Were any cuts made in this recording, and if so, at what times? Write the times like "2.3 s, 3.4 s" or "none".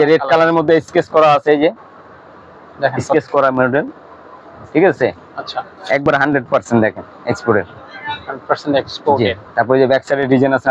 none